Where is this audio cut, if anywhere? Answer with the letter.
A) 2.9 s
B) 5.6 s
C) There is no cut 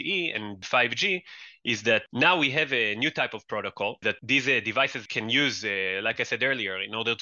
C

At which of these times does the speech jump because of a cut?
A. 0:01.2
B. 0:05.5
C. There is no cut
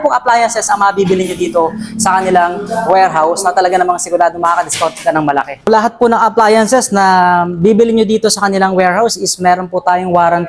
B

